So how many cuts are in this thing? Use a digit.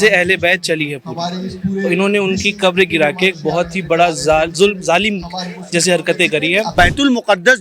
1